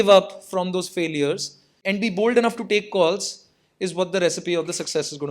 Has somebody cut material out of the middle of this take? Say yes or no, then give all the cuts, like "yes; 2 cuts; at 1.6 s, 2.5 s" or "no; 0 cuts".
yes; 1 cut; at 1.8 s